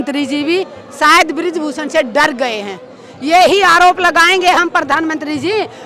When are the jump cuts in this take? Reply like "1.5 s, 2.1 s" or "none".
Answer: none